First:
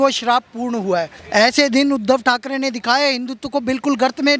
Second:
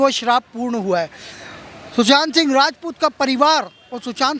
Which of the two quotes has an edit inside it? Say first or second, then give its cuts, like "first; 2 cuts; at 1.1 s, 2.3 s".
first; 1 cut; at 1.2 s